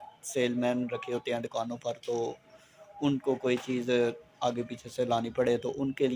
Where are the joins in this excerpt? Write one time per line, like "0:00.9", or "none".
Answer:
none